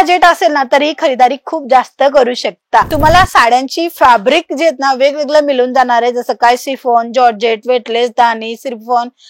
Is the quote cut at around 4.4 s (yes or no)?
no